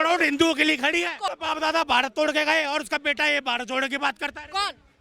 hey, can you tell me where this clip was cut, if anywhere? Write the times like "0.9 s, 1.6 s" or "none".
1.3 s